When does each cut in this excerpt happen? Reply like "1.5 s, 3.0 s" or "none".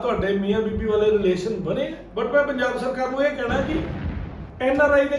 2.0 s